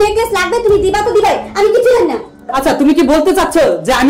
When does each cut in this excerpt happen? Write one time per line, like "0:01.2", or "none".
none